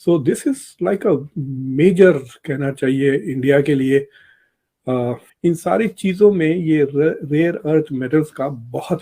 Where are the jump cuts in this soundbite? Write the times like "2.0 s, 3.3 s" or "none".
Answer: 5.3 s